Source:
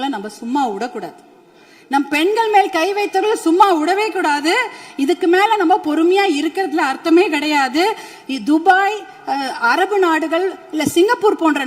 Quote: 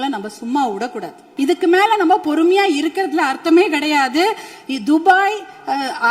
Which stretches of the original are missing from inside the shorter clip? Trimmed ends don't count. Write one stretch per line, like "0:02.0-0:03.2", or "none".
0:01.2-0:04.8

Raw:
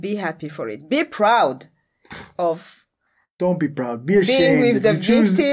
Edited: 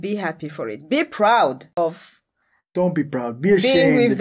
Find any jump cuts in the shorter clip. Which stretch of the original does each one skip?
0:01.7-0:02.3

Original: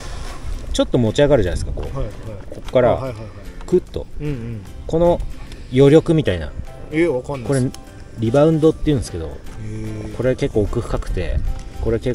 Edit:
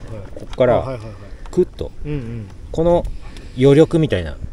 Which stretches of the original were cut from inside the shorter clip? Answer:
none

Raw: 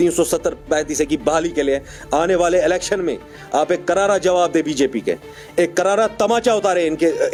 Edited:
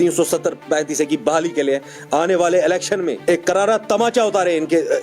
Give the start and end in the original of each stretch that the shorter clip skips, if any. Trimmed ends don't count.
0:03.2-0:05.5

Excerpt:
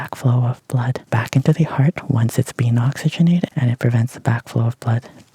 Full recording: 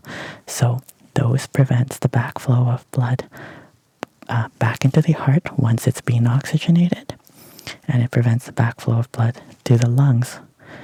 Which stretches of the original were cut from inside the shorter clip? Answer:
0:03.3-0:04.5
0:07.0-0:07.9

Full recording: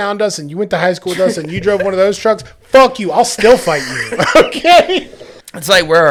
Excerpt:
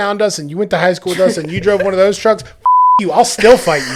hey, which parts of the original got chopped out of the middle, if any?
none

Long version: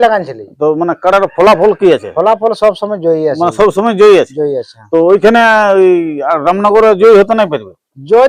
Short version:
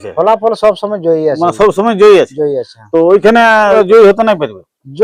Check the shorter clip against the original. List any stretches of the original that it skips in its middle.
0:05.7-0:06.9

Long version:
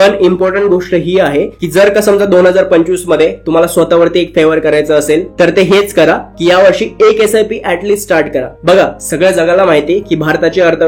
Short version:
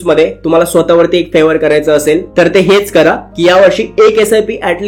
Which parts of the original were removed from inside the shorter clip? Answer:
none

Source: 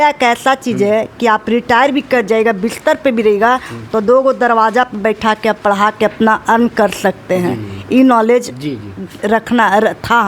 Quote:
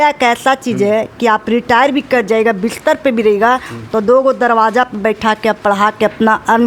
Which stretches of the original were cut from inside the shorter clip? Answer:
none

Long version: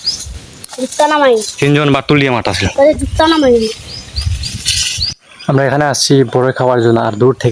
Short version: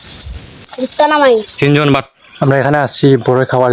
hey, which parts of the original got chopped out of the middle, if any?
0:02.0-0:05.1

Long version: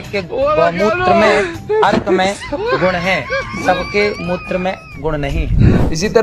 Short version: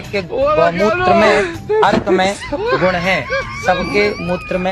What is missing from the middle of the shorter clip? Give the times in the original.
none

